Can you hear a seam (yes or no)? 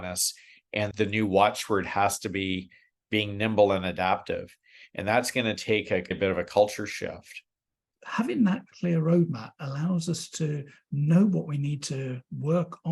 yes